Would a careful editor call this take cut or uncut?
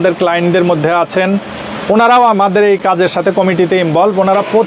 uncut